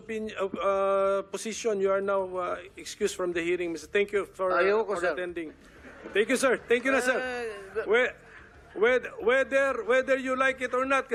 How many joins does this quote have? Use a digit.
0